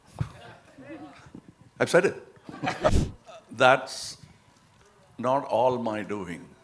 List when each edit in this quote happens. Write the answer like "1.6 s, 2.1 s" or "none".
2.9 s